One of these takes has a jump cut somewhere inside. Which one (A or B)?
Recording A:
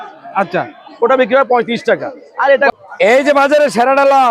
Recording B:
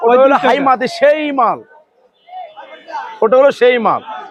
A